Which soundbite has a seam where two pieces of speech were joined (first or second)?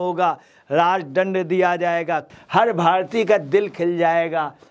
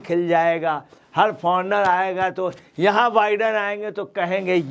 first